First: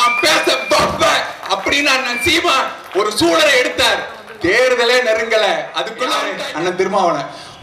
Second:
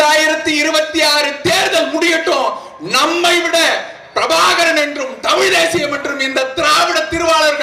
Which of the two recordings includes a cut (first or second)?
first